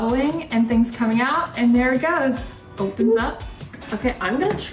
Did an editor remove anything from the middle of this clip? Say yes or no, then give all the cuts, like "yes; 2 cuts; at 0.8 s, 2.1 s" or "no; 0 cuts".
yes; 1 cut; at 3.7 s